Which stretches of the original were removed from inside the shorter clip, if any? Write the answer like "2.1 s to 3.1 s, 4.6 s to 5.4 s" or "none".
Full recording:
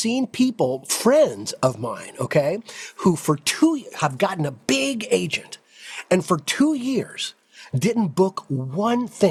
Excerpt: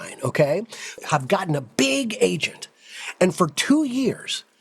2.9 s to 3.9 s